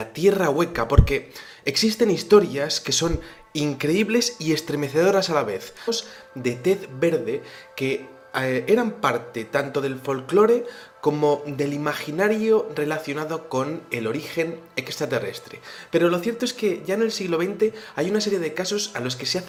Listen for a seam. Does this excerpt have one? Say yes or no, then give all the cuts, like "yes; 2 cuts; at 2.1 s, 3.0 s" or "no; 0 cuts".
no; 0 cuts